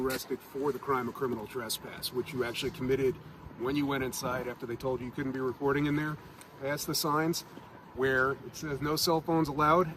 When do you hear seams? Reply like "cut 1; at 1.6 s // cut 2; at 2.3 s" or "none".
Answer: none

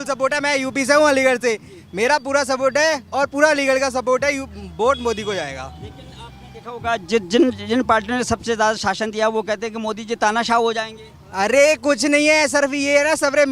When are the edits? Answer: none

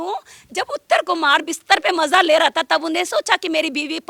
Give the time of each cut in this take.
none

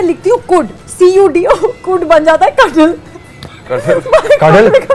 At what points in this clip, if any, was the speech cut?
none

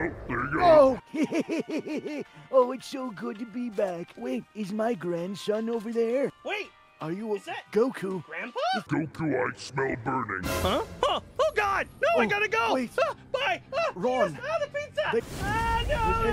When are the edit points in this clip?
cut 1; at 1.0 s // cut 2; at 8.8 s // cut 3; at 15.2 s

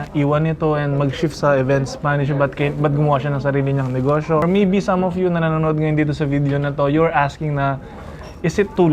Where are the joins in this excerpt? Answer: cut 1; at 4.4 s

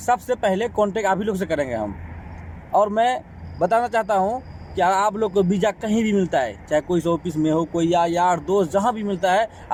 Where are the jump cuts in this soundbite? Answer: none

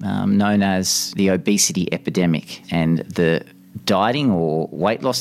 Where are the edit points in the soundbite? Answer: cut 1; at 1.1 s // cut 2; at 2.6 s

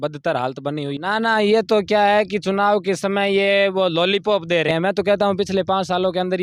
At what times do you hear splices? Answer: cut 1; at 1.0 s // cut 2; at 4.7 s

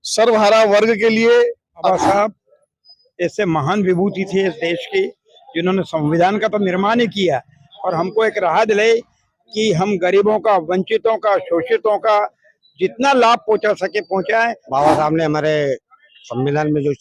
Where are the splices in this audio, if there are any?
cut 1; at 1.9 s // cut 2; at 14.6 s

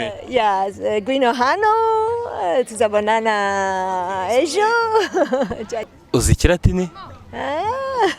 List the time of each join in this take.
cut 1; at 6.0 s

